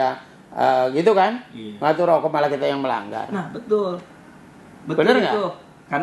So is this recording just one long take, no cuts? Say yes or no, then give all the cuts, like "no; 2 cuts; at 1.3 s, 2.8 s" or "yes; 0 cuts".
yes; 0 cuts